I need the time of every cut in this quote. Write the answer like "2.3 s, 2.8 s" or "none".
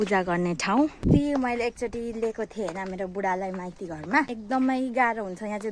1.0 s, 4.4 s